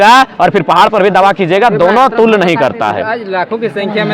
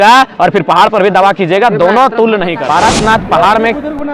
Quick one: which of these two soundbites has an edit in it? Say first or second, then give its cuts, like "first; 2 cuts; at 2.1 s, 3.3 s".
second; 1 cut; at 2.6 s